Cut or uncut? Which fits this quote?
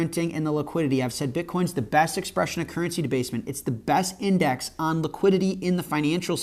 uncut